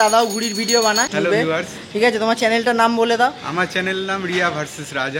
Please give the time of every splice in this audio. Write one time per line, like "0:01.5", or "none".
0:01.1